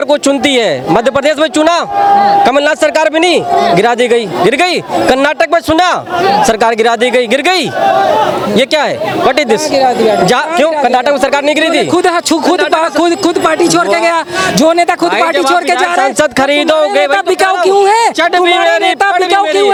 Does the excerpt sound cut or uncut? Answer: uncut